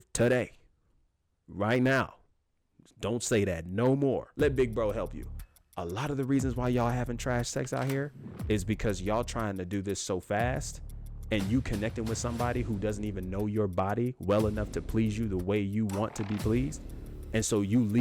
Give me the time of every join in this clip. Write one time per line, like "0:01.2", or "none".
0:04.3